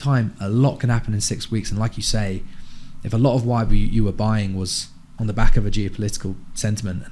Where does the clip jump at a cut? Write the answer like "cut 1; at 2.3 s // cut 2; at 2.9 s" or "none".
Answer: none